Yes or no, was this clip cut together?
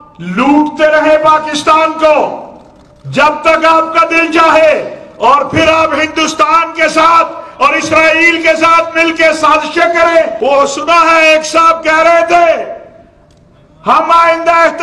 yes